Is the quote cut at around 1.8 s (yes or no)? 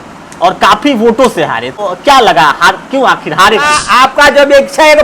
yes